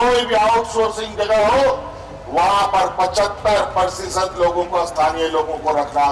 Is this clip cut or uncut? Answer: uncut